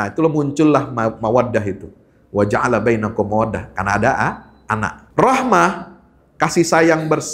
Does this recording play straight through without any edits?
no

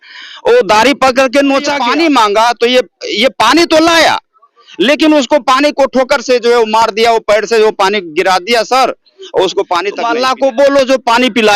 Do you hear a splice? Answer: yes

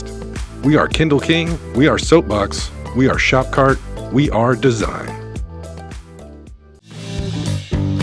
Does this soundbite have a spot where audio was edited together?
yes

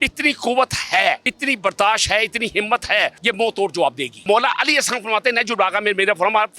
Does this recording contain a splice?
yes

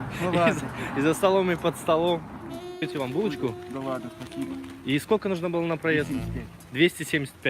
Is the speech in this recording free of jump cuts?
no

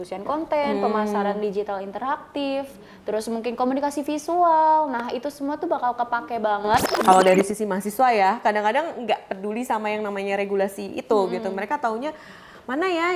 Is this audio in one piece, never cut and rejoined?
no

